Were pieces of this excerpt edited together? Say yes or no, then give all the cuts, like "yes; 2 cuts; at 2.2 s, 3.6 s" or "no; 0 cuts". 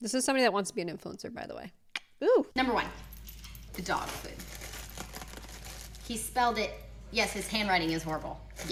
no; 0 cuts